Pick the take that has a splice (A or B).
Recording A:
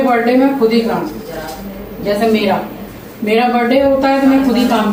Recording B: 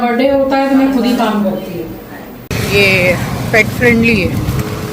B